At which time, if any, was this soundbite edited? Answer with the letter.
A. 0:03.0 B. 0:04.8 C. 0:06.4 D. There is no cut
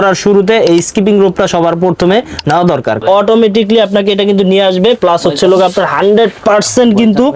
A